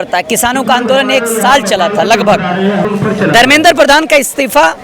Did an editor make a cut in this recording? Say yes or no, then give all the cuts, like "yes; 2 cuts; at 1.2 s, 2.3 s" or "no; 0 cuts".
yes; 1 cut; at 2.9 s